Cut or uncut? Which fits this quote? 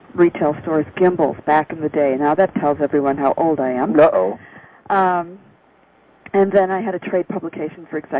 uncut